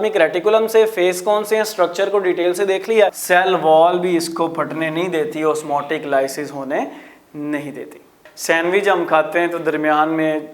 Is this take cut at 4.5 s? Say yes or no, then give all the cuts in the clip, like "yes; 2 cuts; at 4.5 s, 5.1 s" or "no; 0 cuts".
no; 2 cuts; at 3.2 s, 8.1 s